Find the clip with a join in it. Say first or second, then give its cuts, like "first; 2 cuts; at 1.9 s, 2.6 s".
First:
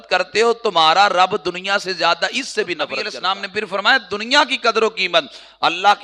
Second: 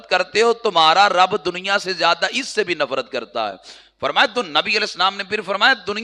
first; 1 cut; at 3.1 s